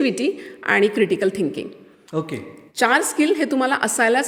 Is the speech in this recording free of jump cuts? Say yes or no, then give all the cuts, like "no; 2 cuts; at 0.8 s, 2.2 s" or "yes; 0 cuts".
yes; 0 cuts